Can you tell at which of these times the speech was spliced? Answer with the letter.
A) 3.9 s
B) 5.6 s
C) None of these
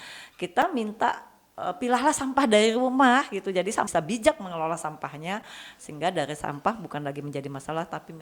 A